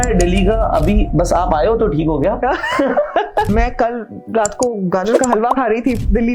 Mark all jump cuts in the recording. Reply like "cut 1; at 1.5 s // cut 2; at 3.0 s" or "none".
cut 1; at 3.5 s